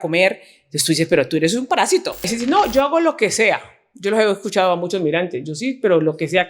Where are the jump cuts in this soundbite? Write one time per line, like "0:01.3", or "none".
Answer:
0:02.3